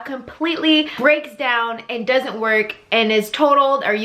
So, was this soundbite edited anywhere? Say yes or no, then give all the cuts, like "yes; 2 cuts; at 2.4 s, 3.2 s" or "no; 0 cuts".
yes; 1 cut; at 0.9 s